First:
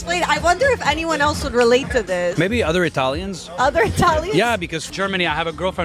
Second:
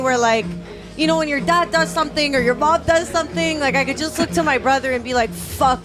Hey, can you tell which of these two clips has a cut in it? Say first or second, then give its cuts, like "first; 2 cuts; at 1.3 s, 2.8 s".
first; 2 cuts; at 2.3 s, 4.9 s